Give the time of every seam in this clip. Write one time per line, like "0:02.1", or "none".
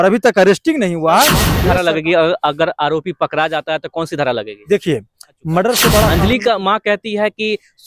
0:01.5
0:06.1